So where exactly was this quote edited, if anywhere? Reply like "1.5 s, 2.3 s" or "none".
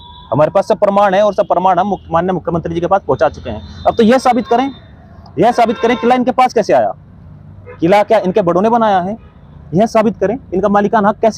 none